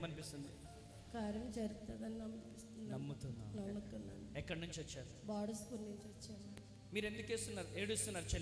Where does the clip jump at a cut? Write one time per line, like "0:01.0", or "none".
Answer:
none